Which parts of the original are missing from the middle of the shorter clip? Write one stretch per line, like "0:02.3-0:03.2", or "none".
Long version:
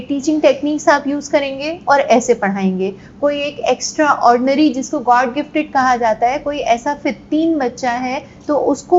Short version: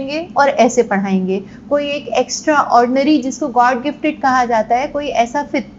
none